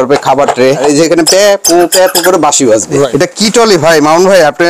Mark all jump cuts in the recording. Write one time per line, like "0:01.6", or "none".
0:00.8
0:03.1